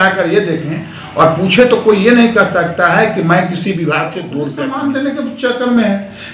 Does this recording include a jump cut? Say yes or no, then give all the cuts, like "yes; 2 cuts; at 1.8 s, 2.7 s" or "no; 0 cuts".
yes; 1 cut; at 4.5 s